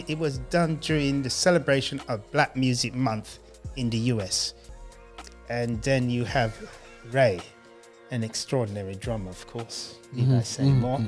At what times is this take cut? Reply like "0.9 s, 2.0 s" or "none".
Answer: 4.7 s